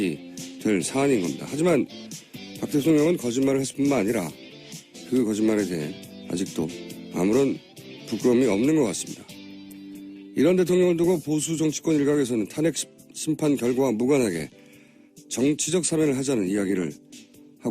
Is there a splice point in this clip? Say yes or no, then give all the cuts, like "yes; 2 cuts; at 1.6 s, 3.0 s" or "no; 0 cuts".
yes; 1 cut; at 6.7 s